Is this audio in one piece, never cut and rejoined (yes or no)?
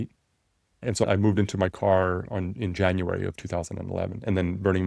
no